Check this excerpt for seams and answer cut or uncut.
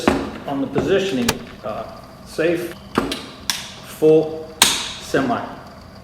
cut